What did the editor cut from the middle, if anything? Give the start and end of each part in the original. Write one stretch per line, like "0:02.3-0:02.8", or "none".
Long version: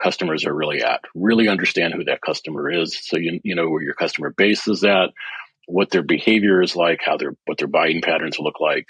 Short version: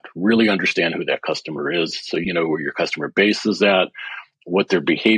0:03.2-0:03.4

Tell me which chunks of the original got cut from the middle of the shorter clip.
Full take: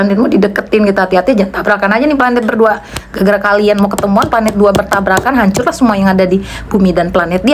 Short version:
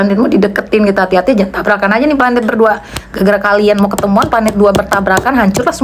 none

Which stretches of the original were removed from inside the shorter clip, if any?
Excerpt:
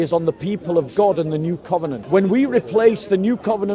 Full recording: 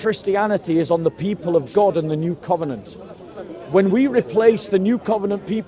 0:02.8-0:03.6

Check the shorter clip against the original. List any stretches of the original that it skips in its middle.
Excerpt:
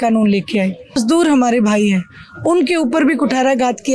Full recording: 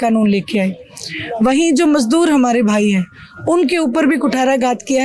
0:01.0-0:02.0

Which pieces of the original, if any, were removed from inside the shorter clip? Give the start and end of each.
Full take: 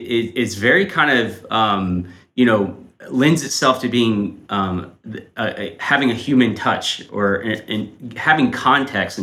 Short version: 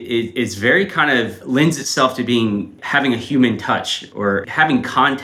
0:01.4-0:03.0
0:04.4-0:05.7
0:07.4-0:08.2

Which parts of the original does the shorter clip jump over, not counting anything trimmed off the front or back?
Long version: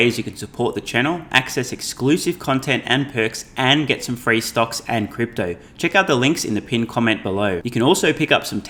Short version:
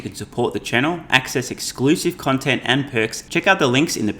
0:03.4-0:05.7

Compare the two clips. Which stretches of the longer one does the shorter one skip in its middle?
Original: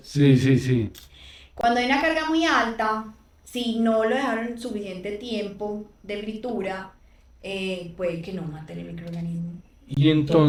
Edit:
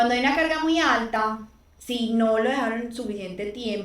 none

